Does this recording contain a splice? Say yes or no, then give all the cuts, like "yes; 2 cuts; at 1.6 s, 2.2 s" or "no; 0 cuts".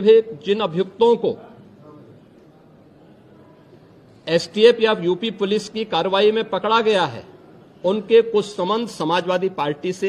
no; 0 cuts